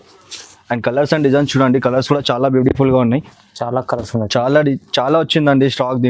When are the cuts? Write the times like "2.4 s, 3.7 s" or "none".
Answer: 3.3 s